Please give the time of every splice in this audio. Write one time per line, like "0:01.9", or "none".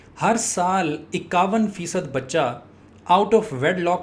none

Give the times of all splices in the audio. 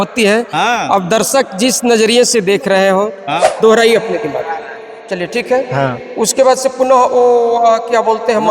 0:03.5

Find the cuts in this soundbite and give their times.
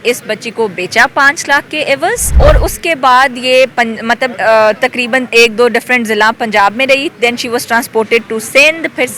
0:02.3

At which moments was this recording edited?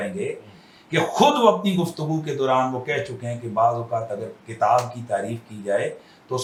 none

